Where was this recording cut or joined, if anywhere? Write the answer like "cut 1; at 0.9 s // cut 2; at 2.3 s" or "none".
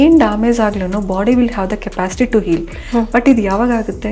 none